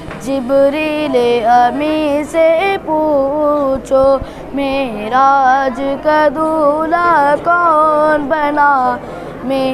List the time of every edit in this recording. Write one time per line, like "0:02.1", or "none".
none

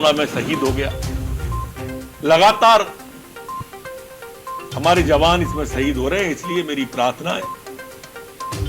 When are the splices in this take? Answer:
0:00.9
0:02.1
0:03.2
0:04.7
0:07.5

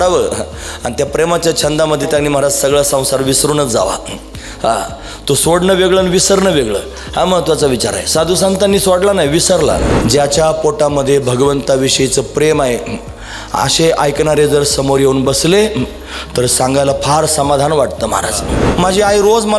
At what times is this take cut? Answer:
0:09.9
0:18.6

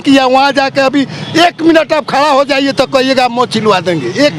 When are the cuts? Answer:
none

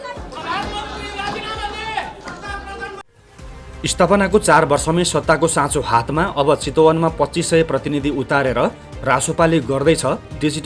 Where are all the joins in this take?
0:03.2

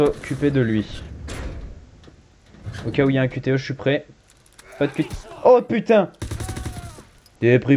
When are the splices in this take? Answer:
none

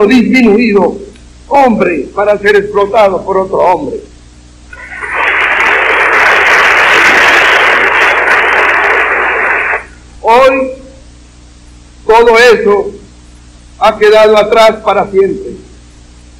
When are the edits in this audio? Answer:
0:09.8

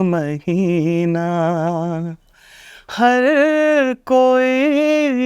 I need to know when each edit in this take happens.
none

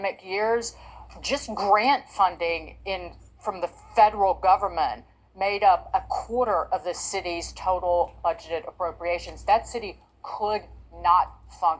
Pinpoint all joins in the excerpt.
none

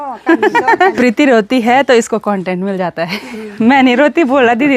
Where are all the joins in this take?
0:00.9

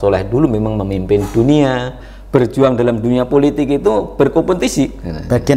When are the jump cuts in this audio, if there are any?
0:02.0

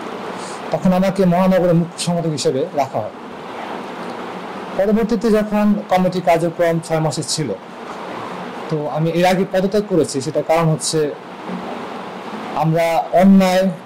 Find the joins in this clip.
none

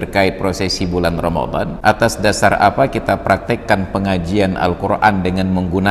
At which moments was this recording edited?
0:01.7

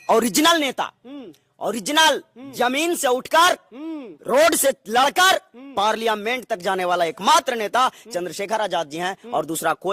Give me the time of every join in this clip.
none

